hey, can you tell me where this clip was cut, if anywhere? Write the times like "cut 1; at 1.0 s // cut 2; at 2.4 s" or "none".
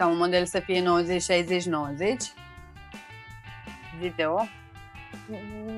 none

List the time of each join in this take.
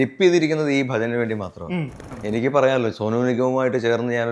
cut 1; at 2.1 s

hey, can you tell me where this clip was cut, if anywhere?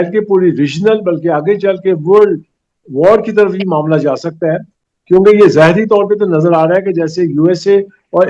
none

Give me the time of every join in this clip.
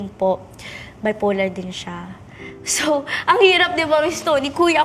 none

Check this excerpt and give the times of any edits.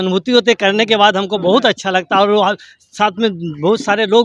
none

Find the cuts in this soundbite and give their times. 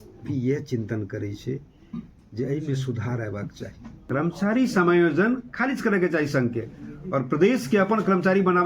cut 1; at 4.0 s

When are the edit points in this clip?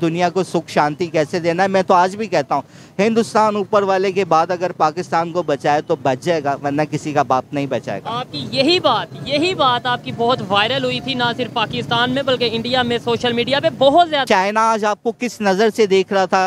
cut 1; at 14.2 s

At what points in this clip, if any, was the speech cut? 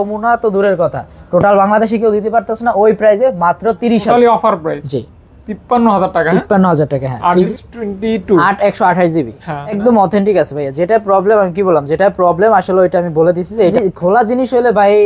cut 1; at 4.0 s // cut 2; at 7.5 s // cut 3; at 9.8 s // cut 4; at 13.7 s

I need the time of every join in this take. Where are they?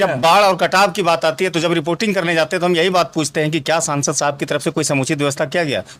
none

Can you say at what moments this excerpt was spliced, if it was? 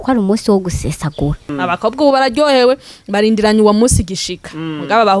cut 1; at 1.5 s

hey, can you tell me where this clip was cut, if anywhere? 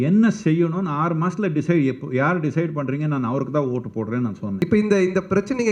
cut 1; at 4.6 s

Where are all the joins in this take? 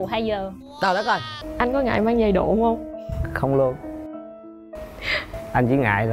cut 1; at 1.4 s

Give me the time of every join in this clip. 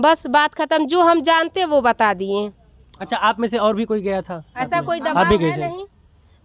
none

